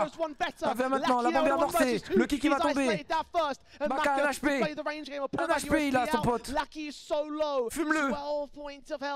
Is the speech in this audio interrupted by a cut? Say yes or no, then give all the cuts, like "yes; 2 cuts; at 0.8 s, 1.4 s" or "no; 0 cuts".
no; 0 cuts